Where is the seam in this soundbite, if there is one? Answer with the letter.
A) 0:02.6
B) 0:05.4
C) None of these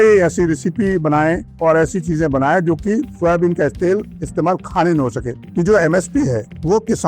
B